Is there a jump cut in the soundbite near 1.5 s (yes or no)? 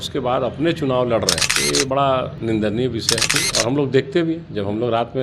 yes